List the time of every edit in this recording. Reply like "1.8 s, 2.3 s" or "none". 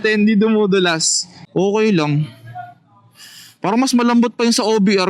1.4 s